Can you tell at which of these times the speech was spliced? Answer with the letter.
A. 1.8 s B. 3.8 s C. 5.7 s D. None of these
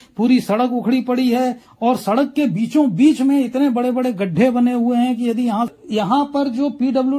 C